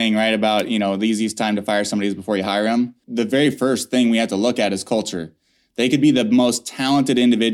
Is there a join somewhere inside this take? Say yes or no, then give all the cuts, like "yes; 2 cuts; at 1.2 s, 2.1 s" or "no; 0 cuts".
yes; 1 cut; at 3.0 s